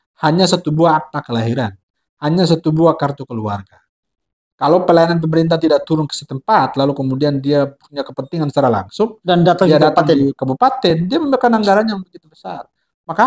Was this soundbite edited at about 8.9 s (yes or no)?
no